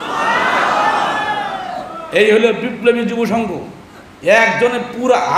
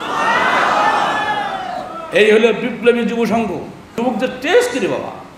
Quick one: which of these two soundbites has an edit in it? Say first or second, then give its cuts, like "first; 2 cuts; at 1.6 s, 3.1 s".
second; 1 cut; at 3.9 s